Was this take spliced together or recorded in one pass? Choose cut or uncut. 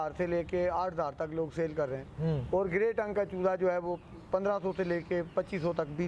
uncut